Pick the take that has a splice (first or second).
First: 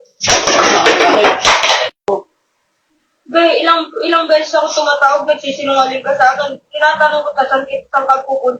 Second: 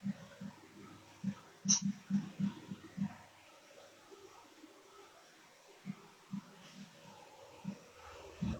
first